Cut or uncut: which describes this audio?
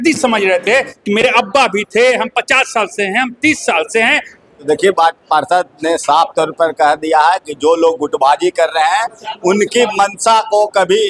cut